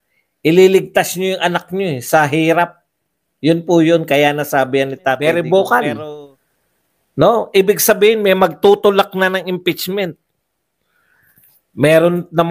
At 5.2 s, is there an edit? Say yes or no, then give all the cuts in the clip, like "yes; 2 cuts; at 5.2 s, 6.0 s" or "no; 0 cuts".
yes; 1 cut; at 5.2 s